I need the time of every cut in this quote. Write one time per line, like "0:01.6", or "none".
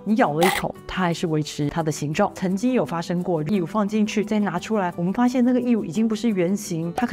0:02.3